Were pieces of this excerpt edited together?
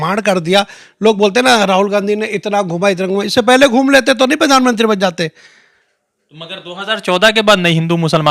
no; 0 cuts

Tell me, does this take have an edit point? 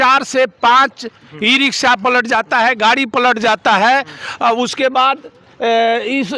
no; 0 cuts

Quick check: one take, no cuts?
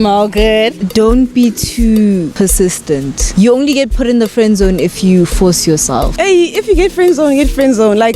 no; 3 cuts; at 0.8 s, 2.7 s, 6.1 s

